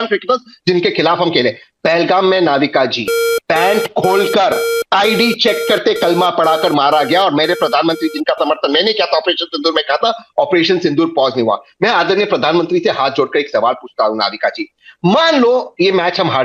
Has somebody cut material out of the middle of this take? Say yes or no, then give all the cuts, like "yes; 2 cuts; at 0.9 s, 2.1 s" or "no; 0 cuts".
no; 0 cuts